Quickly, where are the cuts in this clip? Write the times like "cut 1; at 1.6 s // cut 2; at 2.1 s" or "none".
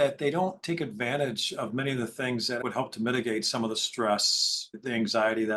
cut 1; at 2.6 s